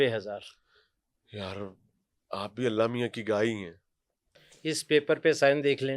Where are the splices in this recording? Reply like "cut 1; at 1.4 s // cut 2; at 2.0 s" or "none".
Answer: cut 1; at 4.3 s